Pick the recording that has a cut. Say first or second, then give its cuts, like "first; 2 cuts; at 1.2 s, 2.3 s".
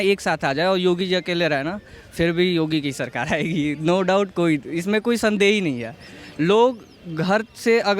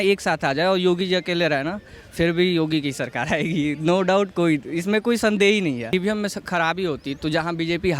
second; 1 cut; at 5.9 s